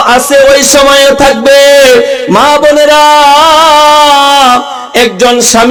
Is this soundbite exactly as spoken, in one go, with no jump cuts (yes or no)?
yes